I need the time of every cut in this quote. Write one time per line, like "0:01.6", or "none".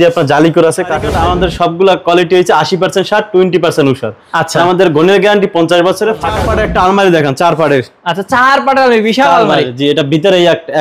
0:01.1
0:06.4